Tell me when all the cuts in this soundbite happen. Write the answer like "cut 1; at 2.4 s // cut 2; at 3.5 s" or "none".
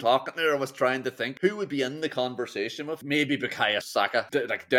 cut 1; at 1.3 s // cut 2; at 3.0 s // cut 3; at 3.8 s